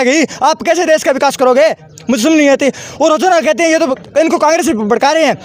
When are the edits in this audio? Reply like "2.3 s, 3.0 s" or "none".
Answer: none

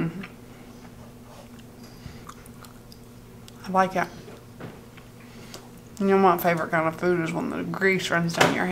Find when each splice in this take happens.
2.2 s

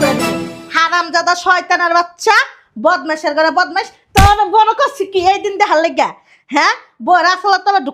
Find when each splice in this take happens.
none

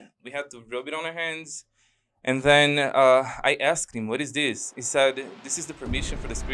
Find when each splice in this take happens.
none

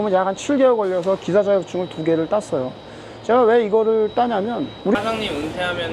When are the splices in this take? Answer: 4.9 s

